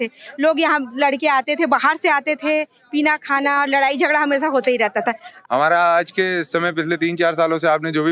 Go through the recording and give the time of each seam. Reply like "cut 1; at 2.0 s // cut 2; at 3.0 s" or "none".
cut 1; at 5.3 s